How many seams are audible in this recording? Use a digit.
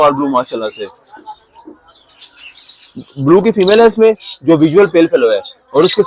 0